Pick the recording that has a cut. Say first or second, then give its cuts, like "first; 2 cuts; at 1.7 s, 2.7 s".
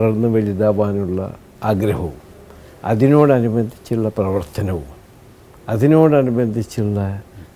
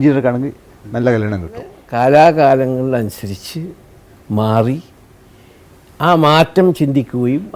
second; 1 cut; at 1.8 s